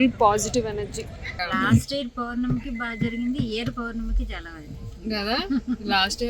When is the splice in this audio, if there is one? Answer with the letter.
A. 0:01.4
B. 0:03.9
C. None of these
A